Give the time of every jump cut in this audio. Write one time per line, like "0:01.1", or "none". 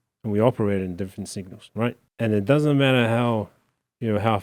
0:02.0